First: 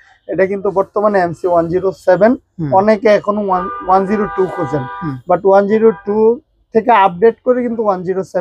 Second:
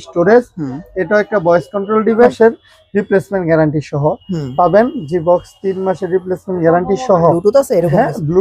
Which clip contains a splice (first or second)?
second